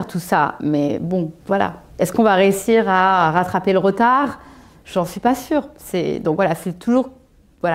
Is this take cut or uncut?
cut